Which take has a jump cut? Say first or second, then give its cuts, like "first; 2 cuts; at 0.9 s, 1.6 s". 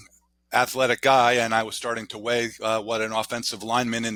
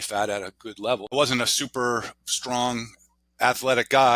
second; 1 cut; at 1.1 s